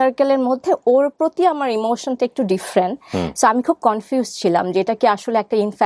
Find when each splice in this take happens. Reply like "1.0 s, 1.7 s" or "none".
none